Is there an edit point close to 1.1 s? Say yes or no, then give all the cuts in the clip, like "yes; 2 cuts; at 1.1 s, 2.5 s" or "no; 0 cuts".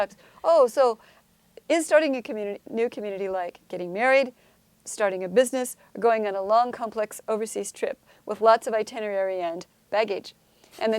yes; 1 cut; at 1.1 s